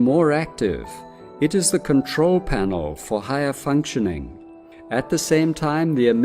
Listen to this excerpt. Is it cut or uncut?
cut